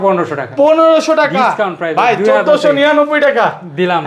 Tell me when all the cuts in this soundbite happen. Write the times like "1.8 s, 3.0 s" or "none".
none